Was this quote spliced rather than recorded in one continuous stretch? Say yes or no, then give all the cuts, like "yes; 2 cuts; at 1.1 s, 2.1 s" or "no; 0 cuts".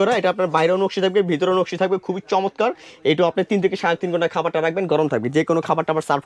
no; 0 cuts